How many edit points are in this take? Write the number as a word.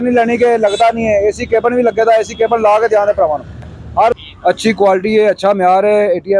one